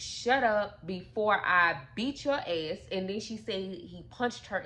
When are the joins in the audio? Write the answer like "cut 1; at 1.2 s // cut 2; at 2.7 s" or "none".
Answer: none